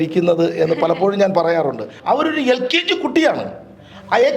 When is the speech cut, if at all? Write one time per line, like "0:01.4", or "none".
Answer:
0:01.9